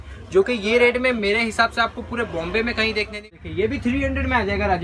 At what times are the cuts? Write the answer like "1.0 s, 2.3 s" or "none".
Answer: 3.2 s

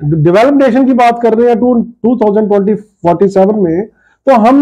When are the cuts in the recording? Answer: none

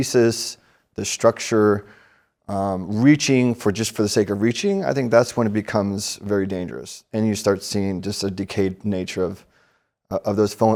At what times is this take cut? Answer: none

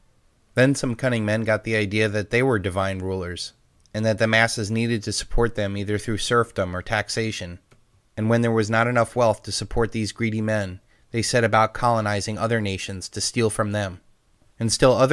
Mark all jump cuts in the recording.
1.1 s

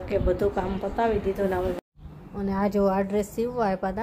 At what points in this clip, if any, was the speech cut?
1.8 s

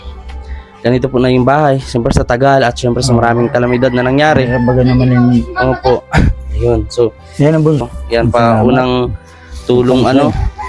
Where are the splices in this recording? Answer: 7.8 s

